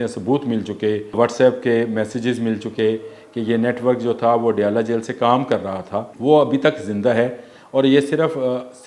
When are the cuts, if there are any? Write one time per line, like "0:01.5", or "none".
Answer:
0:01.2
0:06.1